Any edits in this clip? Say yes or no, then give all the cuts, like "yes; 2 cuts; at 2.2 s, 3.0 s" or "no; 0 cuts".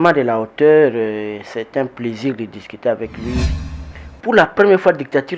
yes; 1 cut; at 3.5 s